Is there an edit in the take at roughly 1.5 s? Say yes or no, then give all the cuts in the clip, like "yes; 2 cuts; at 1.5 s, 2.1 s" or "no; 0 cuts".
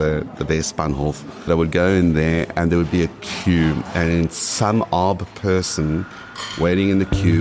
yes; 1 cut; at 1.5 s